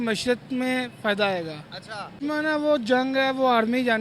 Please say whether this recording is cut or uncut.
cut